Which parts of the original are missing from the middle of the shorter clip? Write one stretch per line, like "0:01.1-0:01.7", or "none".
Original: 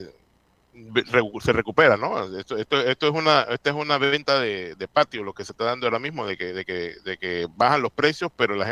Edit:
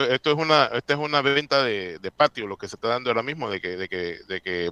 none